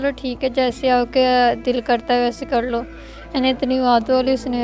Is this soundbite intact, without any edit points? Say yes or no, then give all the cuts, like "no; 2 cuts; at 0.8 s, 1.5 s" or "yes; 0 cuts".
yes; 0 cuts